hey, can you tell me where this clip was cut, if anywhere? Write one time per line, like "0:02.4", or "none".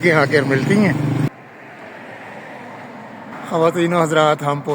0:01.3